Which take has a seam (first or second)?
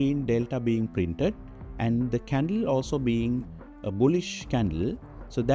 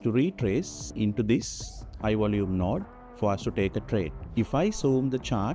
second